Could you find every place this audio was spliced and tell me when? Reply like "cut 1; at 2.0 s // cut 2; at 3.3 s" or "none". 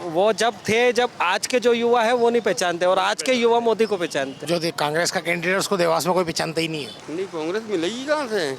cut 1; at 4.4 s // cut 2; at 7.0 s